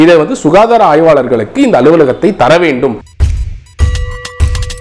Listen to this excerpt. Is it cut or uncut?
cut